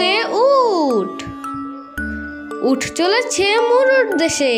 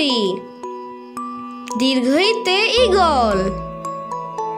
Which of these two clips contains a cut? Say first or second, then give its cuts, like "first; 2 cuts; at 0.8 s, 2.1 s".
first; 2 cuts; at 1.1 s, 2.6 s